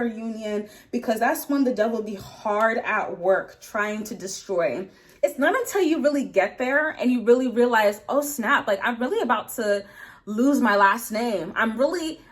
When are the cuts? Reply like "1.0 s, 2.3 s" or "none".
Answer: 5.2 s